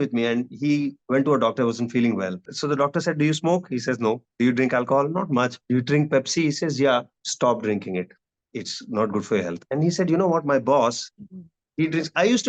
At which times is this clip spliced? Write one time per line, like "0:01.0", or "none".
0:01.0
0:02.5
0:05.6
0:07.2